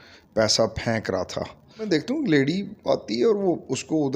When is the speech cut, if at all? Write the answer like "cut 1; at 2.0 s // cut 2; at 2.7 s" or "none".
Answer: cut 1; at 1.8 s

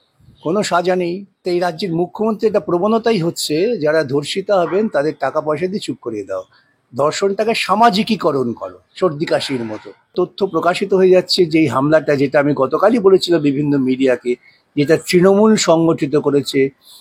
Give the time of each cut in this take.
cut 1; at 1.4 s // cut 2; at 10.1 s

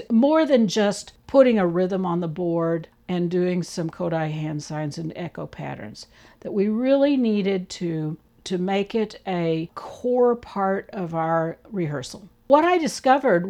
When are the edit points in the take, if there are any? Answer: cut 1; at 12.5 s

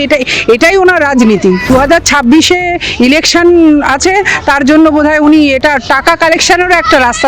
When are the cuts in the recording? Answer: cut 1; at 1.7 s

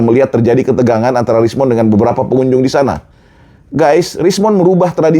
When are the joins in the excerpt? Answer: none

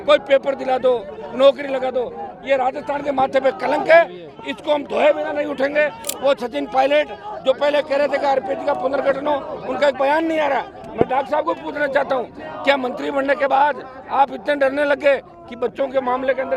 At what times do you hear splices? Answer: cut 1; at 6.1 s

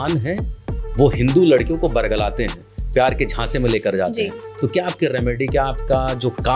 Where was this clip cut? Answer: none

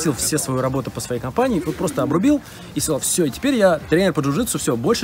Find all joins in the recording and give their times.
none

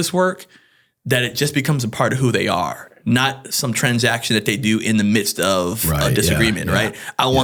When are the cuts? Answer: none

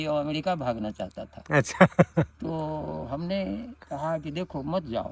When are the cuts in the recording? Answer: none

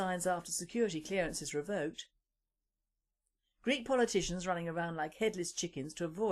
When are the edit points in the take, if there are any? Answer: none

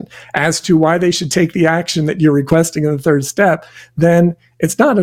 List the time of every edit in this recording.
cut 1; at 2.5 s

